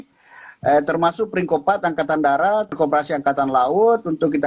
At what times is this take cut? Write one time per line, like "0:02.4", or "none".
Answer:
0:02.7

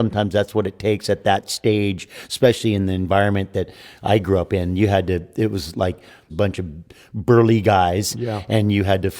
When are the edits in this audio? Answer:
0:06.3

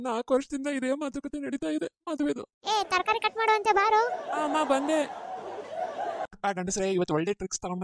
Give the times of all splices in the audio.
0:06.3

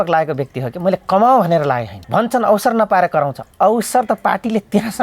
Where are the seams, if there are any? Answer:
0:01.9
0:03.4

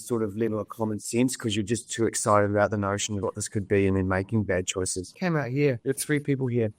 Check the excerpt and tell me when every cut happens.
0:05.2

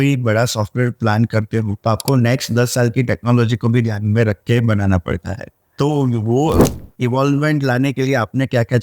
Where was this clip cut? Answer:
0:01.7

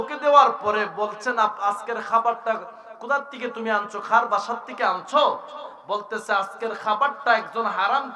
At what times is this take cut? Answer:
none

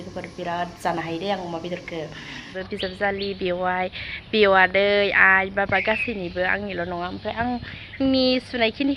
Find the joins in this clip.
0:02.6

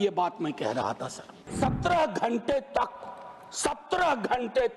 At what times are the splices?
0:01.5

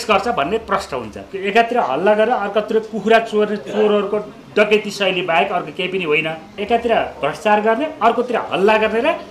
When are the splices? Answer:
0:01.2
0:06.6

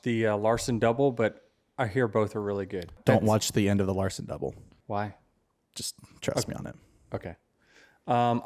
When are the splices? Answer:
0:03.0
0:04.7

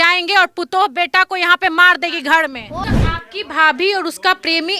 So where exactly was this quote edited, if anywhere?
0:02.8

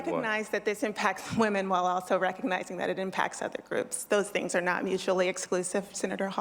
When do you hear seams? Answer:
none

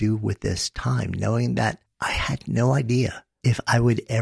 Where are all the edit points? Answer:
0:01.9
0:03.3

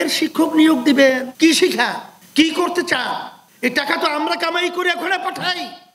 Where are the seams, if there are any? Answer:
0:01.3

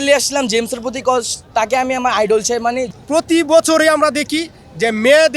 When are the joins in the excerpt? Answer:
0:02.9

